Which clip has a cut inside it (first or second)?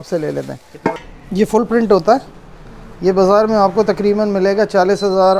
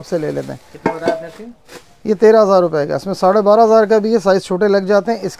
first